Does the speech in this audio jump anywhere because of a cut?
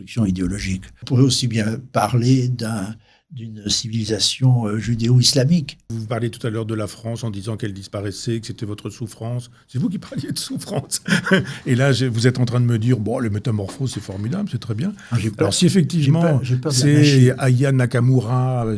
yes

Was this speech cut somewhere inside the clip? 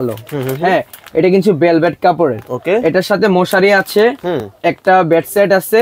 no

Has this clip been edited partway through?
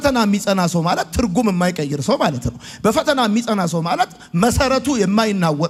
no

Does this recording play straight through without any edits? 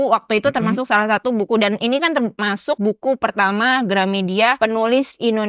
no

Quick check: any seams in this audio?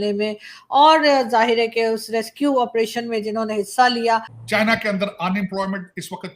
yes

